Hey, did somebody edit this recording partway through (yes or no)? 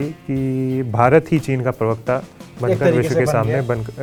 no